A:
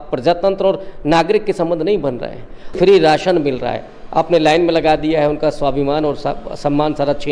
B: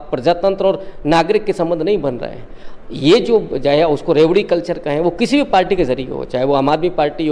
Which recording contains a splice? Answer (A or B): A